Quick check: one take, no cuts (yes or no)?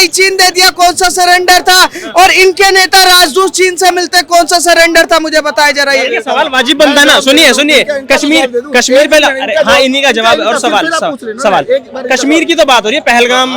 yes